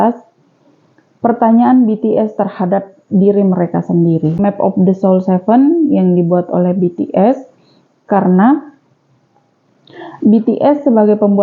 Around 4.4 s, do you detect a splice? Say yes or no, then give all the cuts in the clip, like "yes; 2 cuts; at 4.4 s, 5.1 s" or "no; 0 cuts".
yes; 1 cut; at 4.4 s